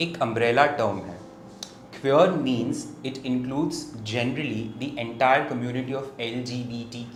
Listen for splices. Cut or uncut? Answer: uncut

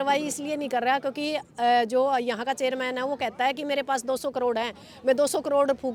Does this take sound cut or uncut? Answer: uncut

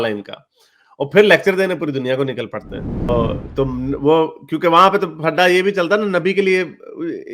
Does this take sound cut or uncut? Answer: cut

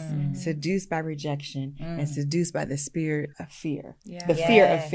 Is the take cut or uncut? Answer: cut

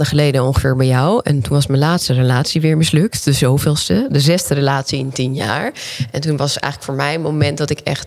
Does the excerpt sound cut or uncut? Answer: uncut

